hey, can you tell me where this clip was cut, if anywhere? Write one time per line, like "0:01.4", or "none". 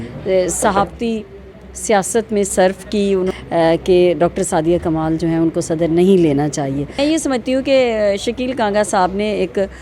0:03.3
0:07.0